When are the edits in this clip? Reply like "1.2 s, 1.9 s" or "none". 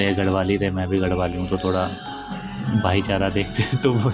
none